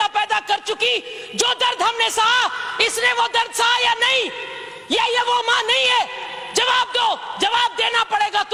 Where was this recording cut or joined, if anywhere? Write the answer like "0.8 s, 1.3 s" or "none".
none